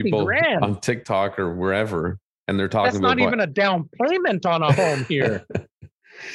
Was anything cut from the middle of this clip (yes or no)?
no